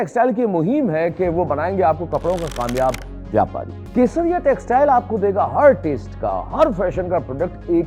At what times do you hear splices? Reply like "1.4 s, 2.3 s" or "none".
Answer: 3.8 s